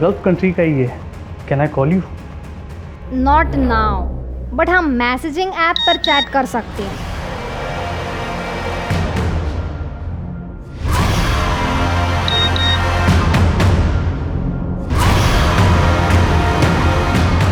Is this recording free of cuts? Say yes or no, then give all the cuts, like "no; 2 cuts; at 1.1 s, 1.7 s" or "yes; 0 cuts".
yes; 0 cuts